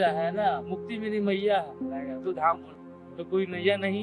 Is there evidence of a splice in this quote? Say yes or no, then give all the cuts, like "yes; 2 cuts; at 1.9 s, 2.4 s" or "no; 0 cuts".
yes; 1 cut; at 2.8 s